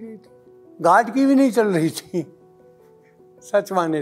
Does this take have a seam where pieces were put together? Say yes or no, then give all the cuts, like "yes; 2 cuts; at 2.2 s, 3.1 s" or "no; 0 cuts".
no; 0 cuts